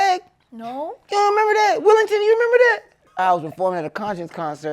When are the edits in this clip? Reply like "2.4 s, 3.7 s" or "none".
3.1 s